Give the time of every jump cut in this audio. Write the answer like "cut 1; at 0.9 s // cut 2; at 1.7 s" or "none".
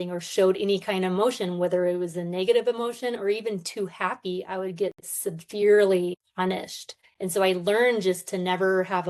cut 1; at 6.8 s